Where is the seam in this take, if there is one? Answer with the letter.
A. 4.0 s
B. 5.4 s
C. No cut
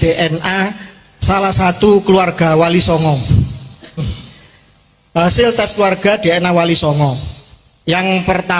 A